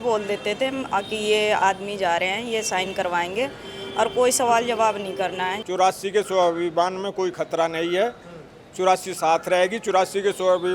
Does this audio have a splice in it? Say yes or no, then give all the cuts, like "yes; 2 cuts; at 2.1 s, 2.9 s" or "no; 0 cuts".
yes; 1 cut; at 5.6 s